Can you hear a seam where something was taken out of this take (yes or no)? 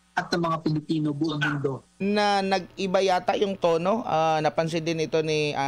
yes